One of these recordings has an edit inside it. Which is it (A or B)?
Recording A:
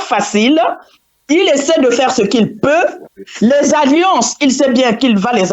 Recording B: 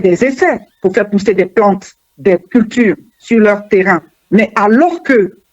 B